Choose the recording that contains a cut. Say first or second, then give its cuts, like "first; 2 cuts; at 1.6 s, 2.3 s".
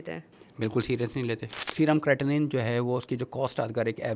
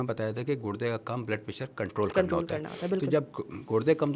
first; 1 cut; at 1.6 s